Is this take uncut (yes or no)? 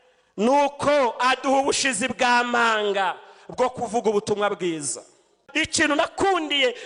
no